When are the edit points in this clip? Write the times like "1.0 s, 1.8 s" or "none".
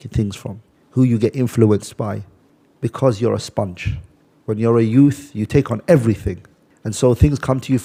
none